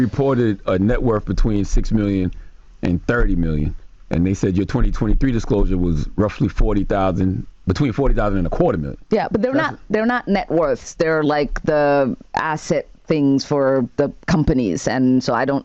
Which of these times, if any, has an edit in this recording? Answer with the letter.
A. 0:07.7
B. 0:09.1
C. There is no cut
C